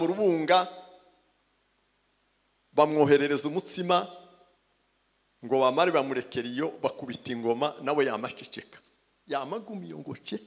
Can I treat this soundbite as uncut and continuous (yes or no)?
yes